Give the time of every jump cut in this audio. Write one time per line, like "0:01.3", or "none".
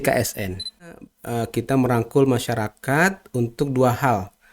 0:00.9